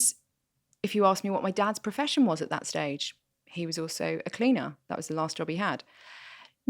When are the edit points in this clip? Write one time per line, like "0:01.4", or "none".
none